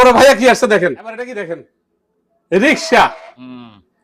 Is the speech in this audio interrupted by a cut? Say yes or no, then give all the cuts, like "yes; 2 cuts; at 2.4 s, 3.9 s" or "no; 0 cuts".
yes; 1 cut; at 1.1 s